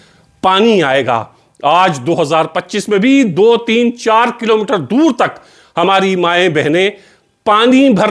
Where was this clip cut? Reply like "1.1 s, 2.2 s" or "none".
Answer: none